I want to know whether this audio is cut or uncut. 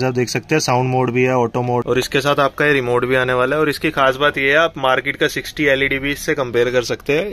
cut